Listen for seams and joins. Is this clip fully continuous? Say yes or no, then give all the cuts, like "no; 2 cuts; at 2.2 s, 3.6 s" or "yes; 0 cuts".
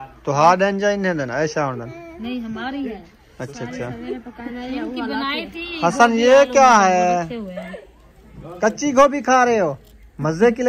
yes; 0 cuts